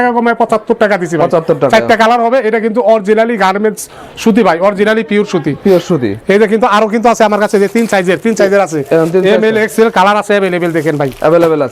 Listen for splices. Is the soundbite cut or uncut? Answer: uncut